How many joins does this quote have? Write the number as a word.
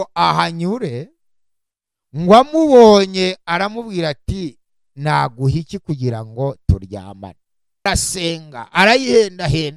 one